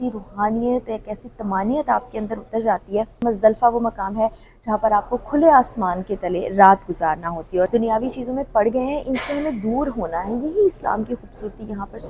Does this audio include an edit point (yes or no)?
yes